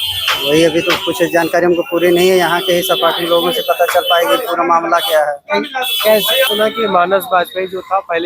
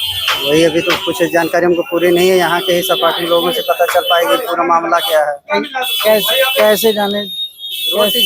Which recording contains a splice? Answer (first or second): first